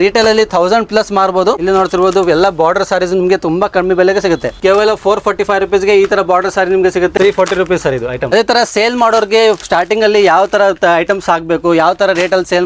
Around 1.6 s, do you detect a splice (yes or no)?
yes